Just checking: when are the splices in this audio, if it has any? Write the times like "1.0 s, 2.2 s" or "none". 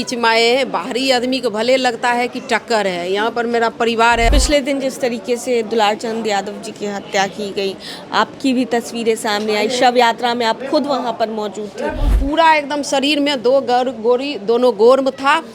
4.3 s, 12.1 s